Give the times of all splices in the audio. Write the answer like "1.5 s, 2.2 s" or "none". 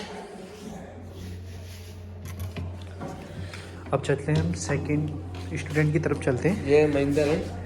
none